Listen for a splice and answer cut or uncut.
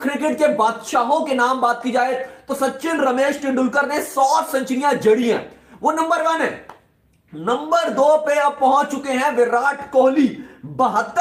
uncut